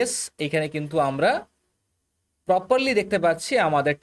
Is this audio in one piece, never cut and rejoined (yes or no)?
yes